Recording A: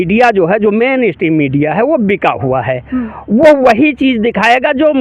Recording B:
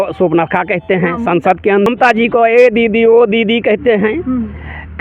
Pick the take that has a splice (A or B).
B